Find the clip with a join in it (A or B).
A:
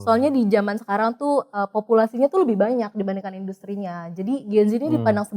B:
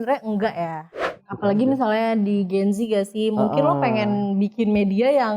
B